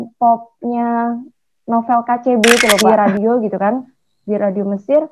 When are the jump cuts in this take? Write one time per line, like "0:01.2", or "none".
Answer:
0:03.0